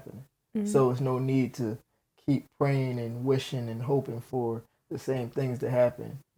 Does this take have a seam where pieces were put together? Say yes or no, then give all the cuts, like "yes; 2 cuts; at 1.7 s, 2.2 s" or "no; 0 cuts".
no; 0 cuts